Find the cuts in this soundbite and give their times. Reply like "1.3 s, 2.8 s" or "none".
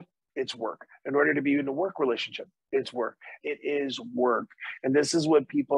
3.3 s

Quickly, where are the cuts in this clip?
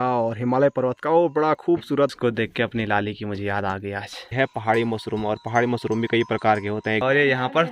2.1 s, 4.3 s, 7.0 s

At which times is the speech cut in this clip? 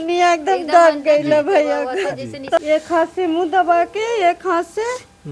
2.6 s

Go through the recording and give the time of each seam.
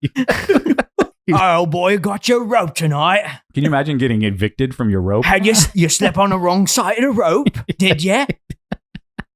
1.2 s

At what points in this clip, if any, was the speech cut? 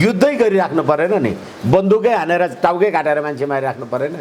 none

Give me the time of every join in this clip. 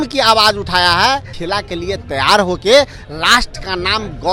1.3 s

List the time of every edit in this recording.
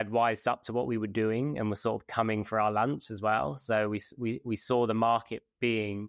none

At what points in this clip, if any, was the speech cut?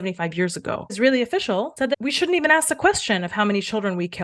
0.9 s, 1.9 s

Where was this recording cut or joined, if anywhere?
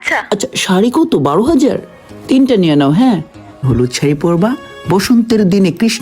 3.6 s

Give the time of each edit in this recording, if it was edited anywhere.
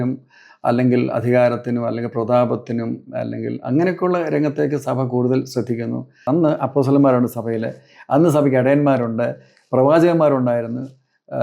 6.2 s

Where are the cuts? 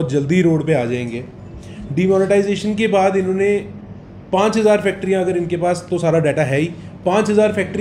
none

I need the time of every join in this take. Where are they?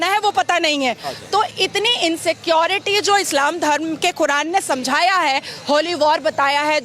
none

